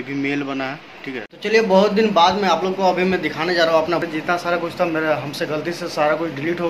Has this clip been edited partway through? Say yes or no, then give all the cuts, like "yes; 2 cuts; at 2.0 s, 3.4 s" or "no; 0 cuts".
yes; 2 cuts; at 1.3 s, 4.1 s